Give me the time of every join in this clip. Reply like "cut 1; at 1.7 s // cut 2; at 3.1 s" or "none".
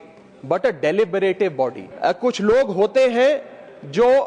cut 1; at 1.8 s